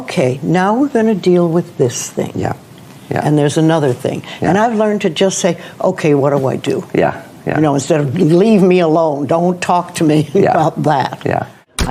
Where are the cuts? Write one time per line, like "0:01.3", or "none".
none